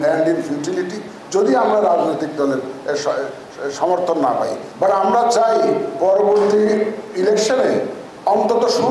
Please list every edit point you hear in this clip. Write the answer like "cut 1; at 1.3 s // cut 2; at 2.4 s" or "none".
cut 1; at 4.6 s